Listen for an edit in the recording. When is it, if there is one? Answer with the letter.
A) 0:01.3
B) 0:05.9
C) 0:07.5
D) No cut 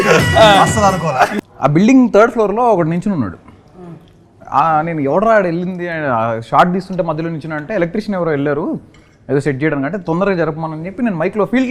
A